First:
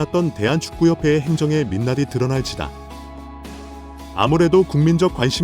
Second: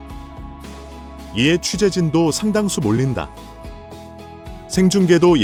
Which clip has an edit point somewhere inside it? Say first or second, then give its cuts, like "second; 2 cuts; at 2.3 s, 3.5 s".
first; 2 cuts; at 2.7 s, 4.0 s